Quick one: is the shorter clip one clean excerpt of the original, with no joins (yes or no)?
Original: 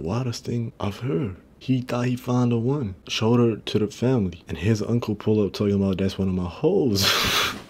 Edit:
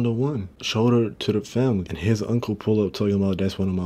no